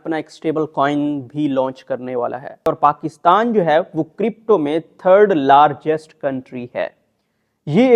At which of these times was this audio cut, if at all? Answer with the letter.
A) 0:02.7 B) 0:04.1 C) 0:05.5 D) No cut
A